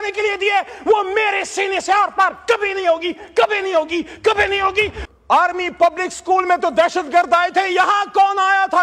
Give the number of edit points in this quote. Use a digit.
1